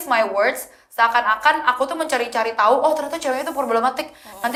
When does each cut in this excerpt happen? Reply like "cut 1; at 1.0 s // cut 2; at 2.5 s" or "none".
none

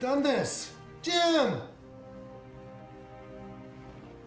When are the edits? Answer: cut 1; at 2.2 s

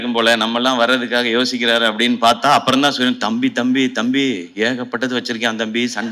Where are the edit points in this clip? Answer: none

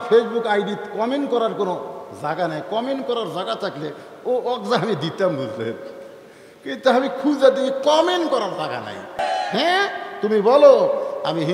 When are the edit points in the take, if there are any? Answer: cut 1; at 9.2 s

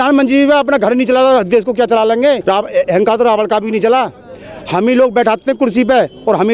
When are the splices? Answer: cut 1; at 2.4 s

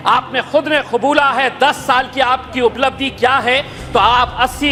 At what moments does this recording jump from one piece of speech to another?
none

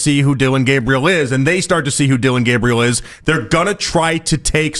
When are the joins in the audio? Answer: none

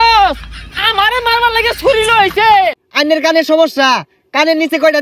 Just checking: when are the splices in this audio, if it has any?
cut 1; at 2.8 s

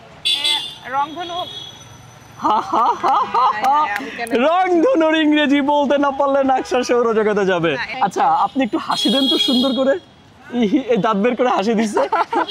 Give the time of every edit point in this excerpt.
cut 1; at 7.9 s

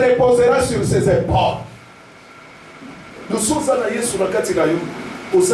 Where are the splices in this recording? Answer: none

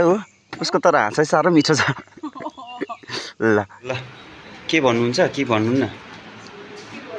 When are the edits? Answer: cut 1; at 4.0 s

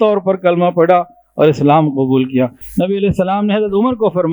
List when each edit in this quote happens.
cut 1; at 2.6 s

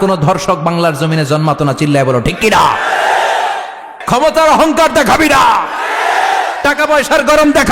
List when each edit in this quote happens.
cut 1; at 3.9 s

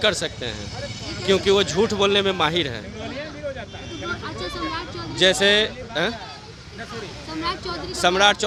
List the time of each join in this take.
none

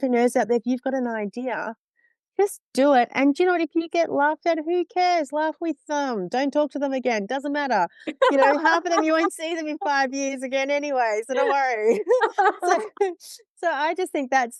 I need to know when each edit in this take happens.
none

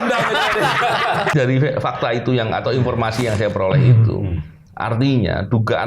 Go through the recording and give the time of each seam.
cut 1; at 1.3 s

